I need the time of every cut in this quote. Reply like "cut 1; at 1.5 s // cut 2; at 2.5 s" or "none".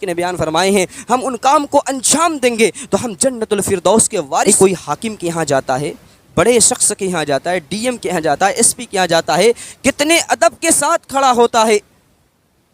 cut 1; at 4.5 s